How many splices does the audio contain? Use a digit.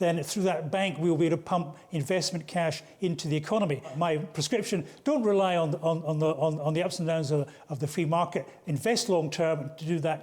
1